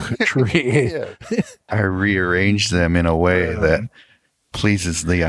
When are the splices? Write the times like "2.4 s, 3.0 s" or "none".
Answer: 1.6 s